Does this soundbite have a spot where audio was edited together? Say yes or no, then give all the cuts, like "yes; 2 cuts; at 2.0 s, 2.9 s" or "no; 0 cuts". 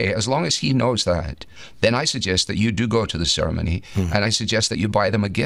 no; 0 cuts